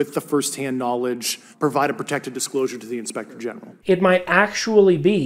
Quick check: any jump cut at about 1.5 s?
yes; 2 cuts; at 1.5 s, 3.7 s

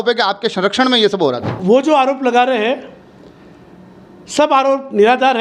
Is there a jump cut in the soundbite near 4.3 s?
no; 1 cut; at 1.6 s

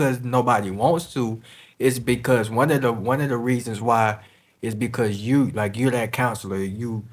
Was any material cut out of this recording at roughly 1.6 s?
no; 0 cuts

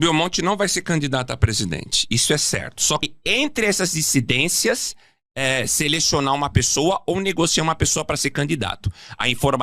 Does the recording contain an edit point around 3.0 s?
yes; 1 cut; at 3.0 s

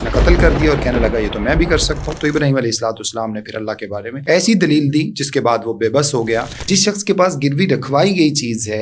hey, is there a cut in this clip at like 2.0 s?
no; 2 cuts; at 4.1 s, 6.7 s

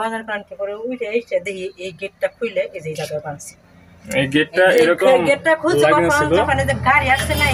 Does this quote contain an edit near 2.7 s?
no; 0 cuts

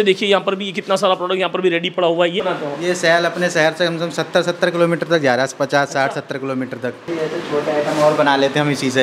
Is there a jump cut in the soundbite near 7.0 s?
yes; 2 cuts; at 2.4 s, 7.0 s

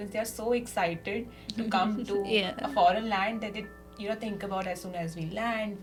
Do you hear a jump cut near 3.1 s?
no; 0 cuts

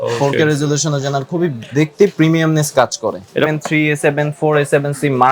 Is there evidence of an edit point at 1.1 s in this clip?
no; 1 cut; at 3.5 s

